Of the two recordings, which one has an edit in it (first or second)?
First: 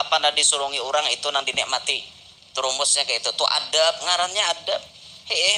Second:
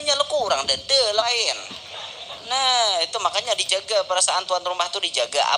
second